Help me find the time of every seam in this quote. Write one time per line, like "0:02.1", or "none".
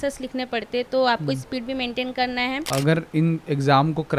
0:02.7